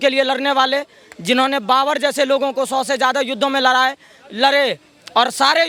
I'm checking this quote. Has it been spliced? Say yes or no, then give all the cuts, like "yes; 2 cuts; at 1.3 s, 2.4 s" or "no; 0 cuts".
no; 0 cuts